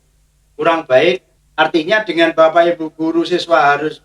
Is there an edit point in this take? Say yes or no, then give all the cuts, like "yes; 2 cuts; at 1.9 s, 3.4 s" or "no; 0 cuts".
yes; 1 cut; at 1.4 s